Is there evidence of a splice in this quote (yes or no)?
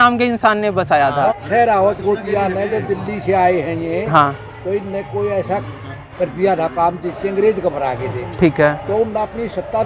yes